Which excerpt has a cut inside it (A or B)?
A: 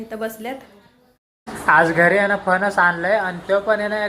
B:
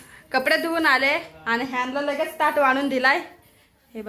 A